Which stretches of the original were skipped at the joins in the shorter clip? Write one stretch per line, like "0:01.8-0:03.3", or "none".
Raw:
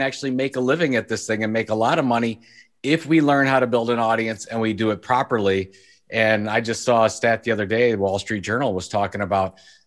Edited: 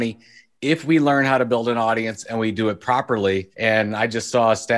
0:05.7-0:06.0

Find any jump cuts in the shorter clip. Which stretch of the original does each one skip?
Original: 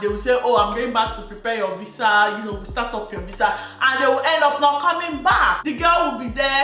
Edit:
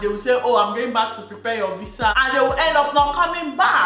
0:02.1-0:03.8

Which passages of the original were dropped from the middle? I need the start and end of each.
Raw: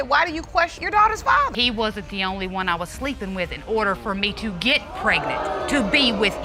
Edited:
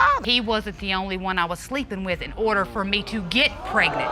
none

